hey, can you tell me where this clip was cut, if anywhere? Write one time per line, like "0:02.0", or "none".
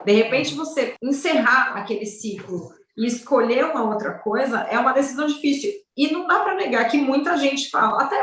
0:01.0